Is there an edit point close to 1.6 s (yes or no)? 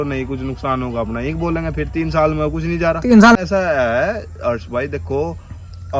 no